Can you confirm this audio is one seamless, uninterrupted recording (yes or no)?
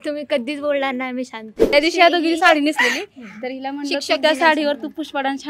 no